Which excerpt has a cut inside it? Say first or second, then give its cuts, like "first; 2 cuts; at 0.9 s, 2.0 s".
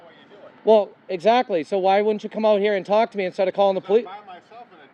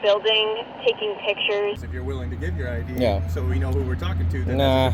second; 1 cut; at 1.8 s